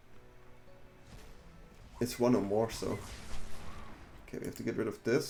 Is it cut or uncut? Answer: uncut